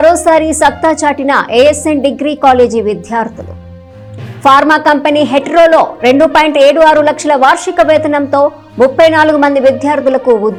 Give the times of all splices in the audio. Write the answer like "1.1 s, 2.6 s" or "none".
none